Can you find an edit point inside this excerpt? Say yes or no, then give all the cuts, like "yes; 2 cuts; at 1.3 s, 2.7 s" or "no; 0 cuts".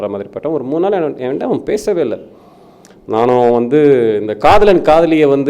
no; 0 cuts